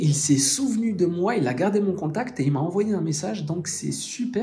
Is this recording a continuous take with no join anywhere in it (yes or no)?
yes